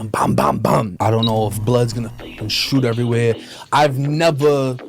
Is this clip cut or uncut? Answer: cut